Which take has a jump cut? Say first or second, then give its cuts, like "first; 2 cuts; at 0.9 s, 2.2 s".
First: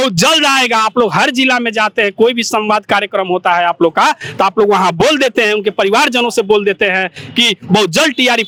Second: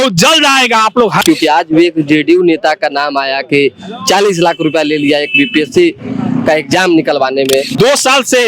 second; 2 cuts; at 1.2 s, 7.7 s